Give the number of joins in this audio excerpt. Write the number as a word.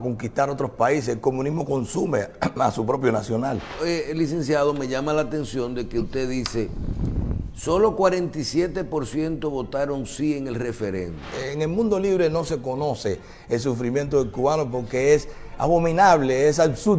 two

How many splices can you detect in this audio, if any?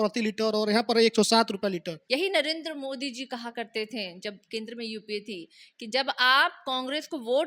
one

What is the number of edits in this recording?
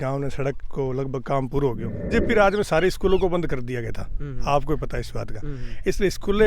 one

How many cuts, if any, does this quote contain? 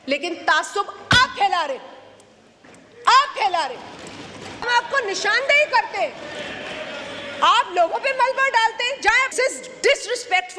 two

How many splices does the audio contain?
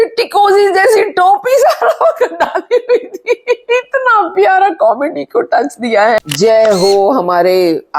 one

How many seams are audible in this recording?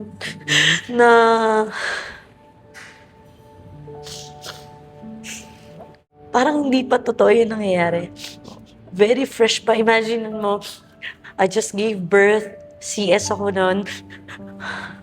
one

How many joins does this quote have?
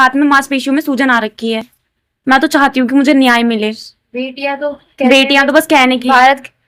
zero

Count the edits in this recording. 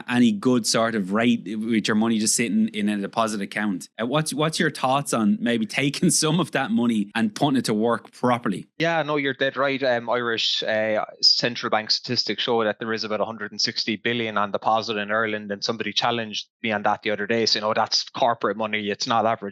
three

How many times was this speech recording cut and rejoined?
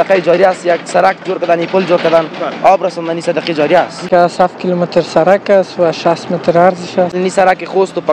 two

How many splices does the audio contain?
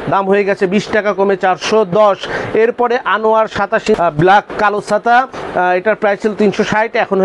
one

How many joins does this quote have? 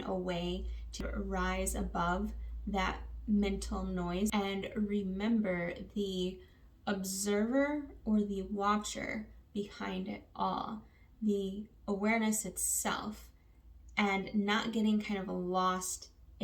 two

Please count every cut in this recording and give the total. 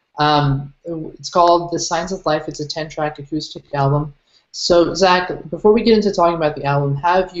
one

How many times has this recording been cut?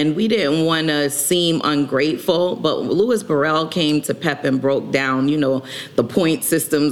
zero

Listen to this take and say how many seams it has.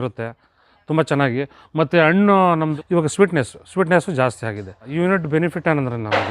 two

